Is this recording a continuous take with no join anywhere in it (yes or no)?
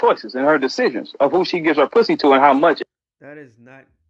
yes